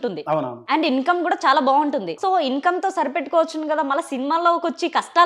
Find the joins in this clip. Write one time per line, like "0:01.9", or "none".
0:02.1

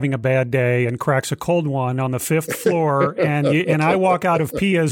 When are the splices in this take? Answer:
none

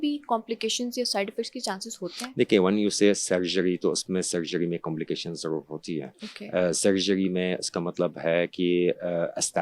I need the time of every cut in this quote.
none

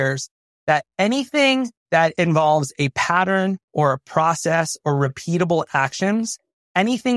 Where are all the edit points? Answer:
0:02.1

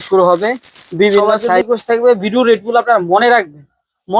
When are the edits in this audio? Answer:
0:01.6

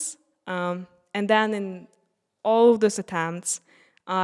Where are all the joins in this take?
none

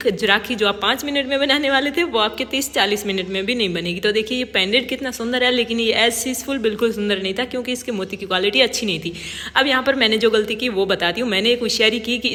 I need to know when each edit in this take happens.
none

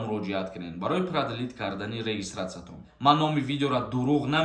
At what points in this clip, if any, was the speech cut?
0:02.9

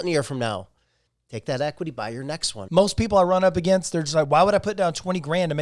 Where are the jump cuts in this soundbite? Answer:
0:02.5

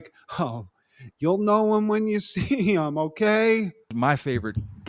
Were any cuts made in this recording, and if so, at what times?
0:03.9

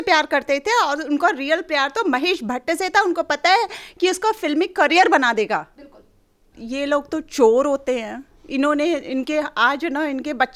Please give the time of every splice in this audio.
0:06.5

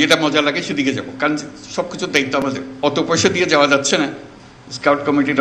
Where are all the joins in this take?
0:02.7

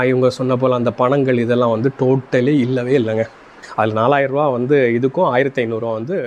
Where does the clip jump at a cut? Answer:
0:03.6

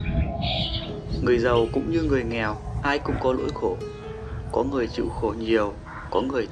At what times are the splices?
0:01.2

